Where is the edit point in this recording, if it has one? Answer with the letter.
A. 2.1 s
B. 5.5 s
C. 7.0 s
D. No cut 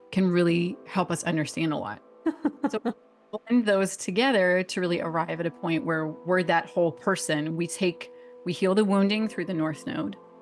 A